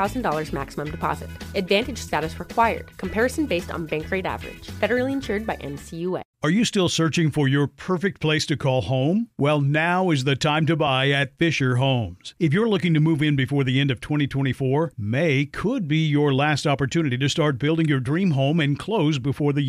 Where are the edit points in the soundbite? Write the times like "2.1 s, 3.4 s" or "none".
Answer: 6.3 s